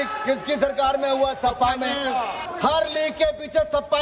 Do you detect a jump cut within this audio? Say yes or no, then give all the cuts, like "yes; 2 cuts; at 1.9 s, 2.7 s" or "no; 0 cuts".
yes; 1 cut; at 2.4 s